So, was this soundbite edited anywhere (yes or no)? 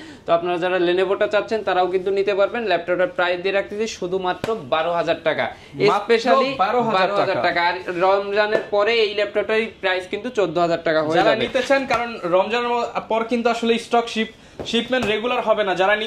no